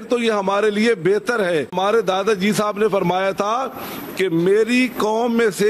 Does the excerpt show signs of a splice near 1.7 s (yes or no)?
yes